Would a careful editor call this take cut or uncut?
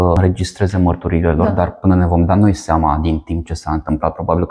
uncut